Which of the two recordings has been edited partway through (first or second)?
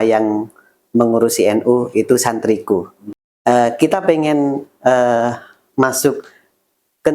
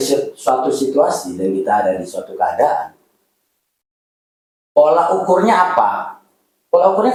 first